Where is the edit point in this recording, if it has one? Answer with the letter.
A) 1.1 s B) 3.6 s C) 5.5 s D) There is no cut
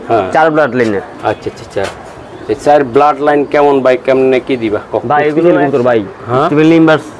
C